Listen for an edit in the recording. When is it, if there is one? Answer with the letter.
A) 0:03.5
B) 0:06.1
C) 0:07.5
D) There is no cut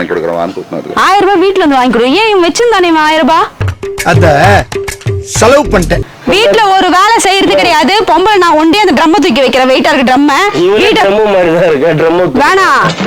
B